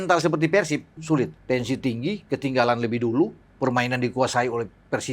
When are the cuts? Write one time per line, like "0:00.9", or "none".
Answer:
0:01.4

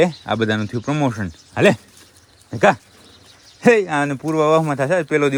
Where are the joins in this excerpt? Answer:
none

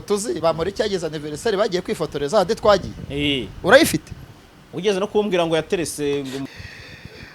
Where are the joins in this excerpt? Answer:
0:06.4

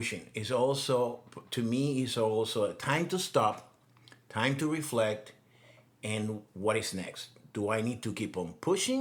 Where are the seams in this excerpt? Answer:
none

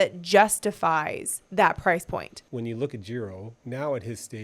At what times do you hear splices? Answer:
0:02.4
0:03.5

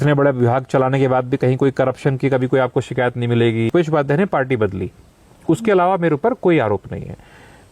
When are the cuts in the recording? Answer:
0:03.7

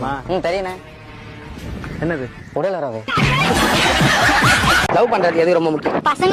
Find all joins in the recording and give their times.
0:04.8

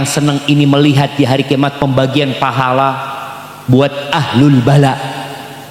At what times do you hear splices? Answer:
none

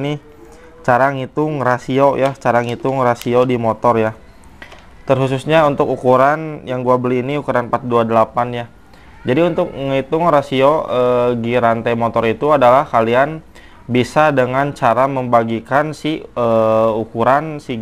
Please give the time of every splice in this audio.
none

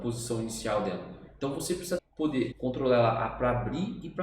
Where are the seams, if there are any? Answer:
0:02.4

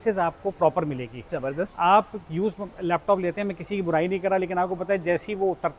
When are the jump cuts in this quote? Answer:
none

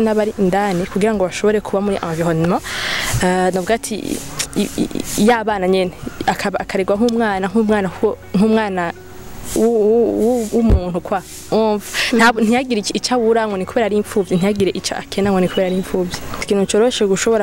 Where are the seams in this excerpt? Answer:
0:16.4

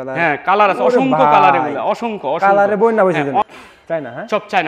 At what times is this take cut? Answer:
0:03.4

